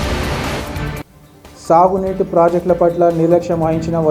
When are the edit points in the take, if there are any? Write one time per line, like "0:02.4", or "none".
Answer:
0:01.0